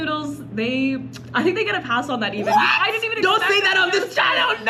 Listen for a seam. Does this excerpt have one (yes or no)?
no